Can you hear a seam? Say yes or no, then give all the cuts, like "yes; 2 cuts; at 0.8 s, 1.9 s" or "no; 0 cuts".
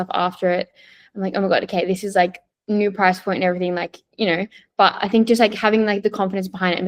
no; 0 cuts